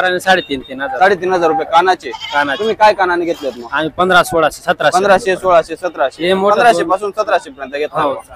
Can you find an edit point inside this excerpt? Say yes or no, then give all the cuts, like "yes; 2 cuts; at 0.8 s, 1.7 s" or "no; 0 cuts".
no; 0 cuts